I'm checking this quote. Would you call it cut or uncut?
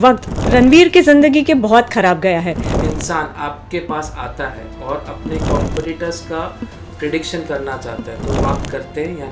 cut